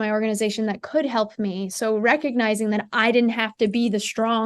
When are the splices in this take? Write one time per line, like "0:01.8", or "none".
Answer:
none